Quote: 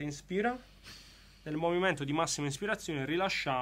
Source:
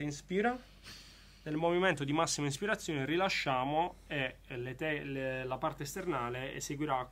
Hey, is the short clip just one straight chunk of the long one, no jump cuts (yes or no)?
yes